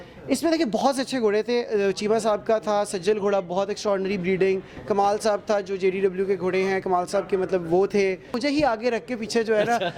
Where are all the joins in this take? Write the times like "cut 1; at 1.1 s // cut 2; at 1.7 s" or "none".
cut 1; at 8.4 s